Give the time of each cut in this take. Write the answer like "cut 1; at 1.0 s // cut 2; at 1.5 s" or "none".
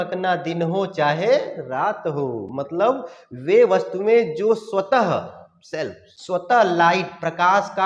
none